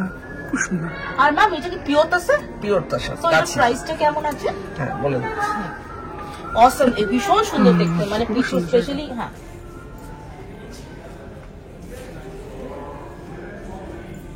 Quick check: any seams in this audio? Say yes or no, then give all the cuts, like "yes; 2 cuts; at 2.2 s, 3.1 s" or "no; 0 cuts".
no; 0 cuts